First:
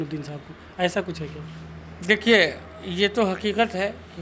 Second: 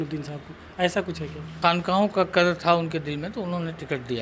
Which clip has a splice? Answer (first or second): second